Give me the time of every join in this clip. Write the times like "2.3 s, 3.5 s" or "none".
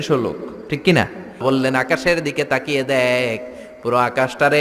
1.4 s

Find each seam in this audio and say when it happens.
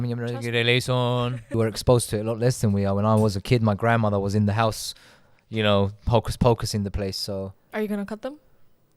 1.5 s, 7.6 s

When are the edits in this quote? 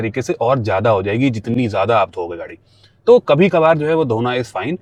none

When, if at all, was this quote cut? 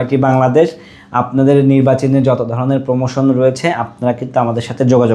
none

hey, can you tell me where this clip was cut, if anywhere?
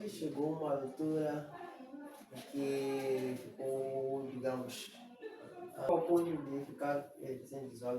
5.9 s

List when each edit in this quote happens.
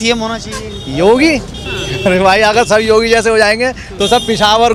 none

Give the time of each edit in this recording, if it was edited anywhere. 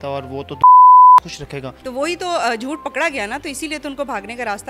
1.8 s

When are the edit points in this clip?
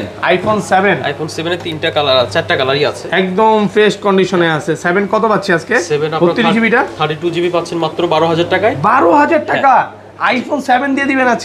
none

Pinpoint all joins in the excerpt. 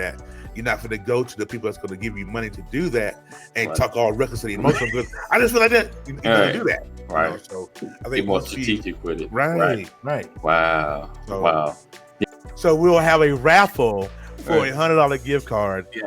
12.2 s

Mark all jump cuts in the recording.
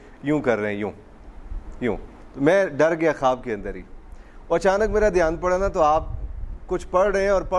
2.2 s

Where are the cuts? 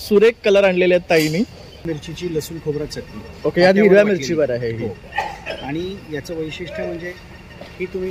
1.9 s

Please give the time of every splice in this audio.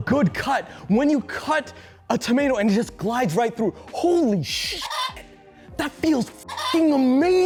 none

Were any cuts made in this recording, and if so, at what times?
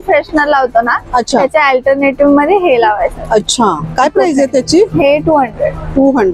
none

